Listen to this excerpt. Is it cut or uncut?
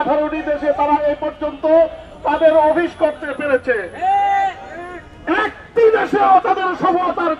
uncut